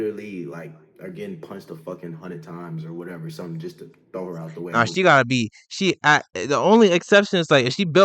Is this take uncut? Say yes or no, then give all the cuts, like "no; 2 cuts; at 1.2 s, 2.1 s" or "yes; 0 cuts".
yes; 0 cuts